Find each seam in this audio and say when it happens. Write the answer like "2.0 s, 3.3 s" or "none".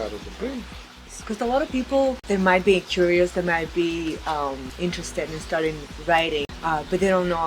1.2 s, 2.2 s, 4.7 s, 6.5 s